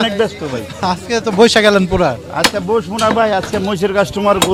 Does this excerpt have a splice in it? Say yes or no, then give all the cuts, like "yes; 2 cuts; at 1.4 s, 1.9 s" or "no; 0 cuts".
no; 0 cuts